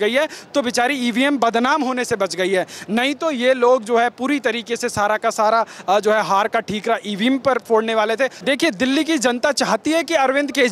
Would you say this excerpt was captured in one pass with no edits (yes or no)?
no